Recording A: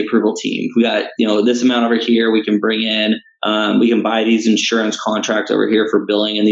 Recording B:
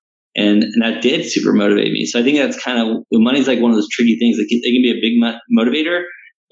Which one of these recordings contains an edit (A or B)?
A